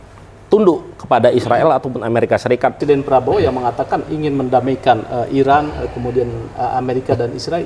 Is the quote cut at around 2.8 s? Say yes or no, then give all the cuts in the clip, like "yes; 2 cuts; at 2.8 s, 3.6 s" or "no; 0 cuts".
yes; 1 cut; at 2.8 s